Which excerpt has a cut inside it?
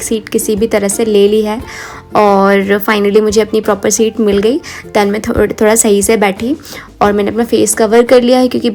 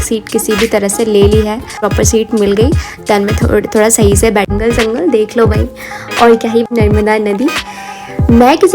second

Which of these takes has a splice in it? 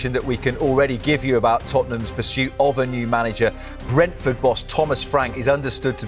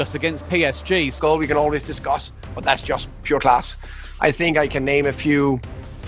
second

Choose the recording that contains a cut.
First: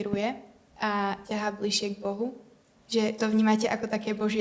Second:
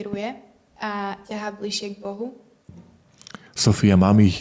second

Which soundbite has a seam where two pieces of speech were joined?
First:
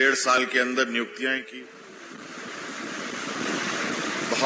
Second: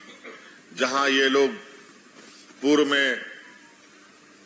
first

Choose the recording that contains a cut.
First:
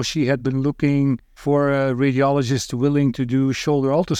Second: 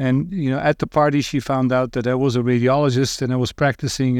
first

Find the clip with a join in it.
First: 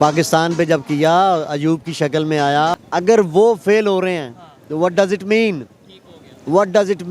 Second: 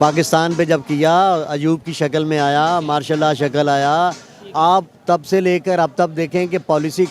first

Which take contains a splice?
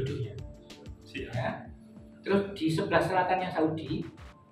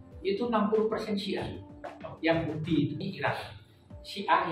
second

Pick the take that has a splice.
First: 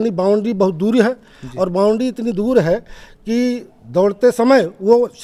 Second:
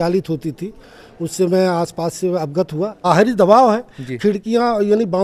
second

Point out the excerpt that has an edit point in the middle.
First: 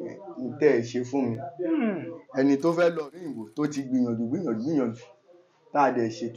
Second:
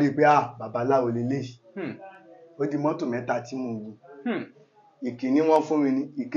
first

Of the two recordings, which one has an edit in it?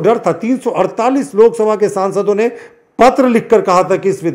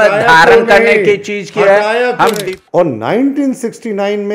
second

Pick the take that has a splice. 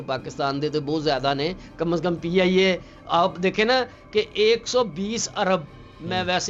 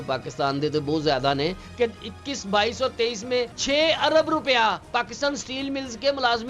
second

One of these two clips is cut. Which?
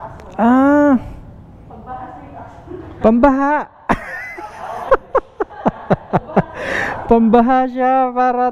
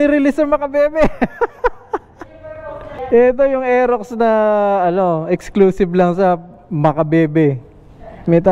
second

